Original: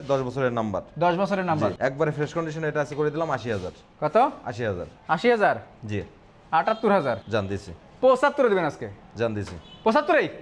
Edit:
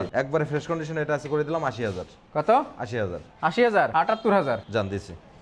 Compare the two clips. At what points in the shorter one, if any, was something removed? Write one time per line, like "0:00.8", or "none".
0:03.9